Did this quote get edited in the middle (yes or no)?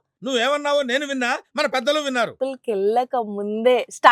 yes